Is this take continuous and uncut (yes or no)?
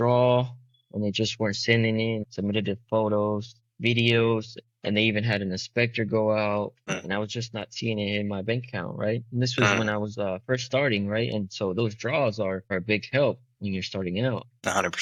yes